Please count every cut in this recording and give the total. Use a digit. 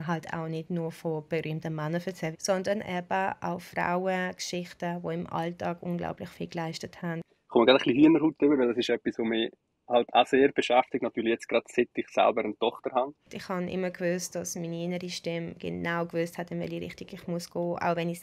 3